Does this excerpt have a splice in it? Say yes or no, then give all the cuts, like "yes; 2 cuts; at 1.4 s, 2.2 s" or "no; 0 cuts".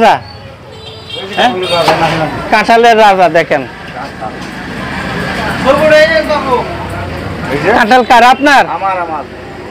no; 0 cuts